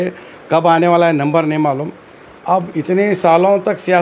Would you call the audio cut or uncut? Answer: uncut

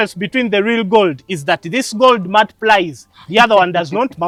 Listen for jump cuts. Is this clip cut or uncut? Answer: uncut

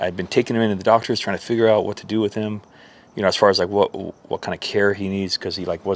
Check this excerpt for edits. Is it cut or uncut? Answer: uncut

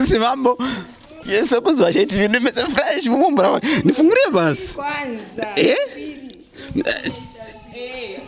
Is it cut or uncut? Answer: cut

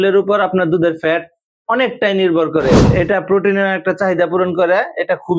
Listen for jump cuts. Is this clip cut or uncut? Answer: cut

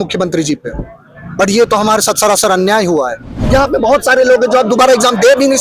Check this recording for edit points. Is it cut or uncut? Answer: cut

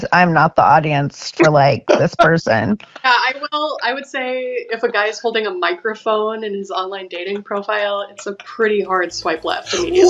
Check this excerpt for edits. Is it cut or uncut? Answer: uncut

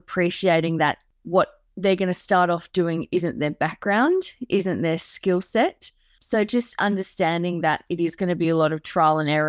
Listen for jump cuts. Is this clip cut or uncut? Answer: cut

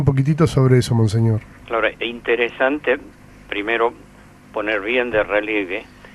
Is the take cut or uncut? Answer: uncut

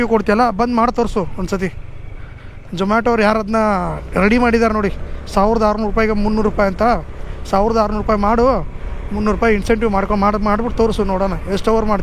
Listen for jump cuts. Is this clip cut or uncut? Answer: uncut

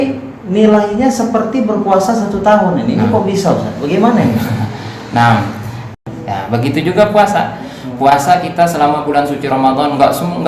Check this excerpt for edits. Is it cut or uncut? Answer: cut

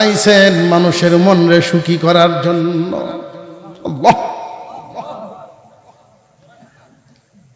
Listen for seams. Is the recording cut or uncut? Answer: uncut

